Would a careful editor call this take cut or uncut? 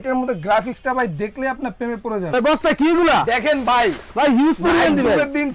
cut